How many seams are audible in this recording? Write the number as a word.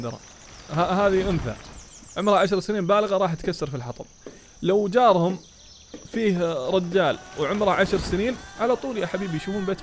one